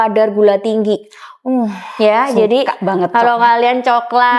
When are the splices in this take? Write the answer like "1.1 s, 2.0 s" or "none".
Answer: none